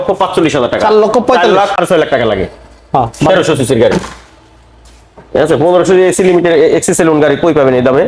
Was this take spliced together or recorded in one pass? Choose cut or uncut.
cut